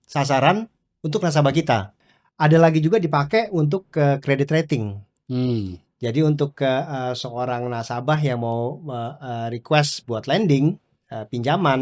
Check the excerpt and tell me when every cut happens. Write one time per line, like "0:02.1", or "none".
0:02.0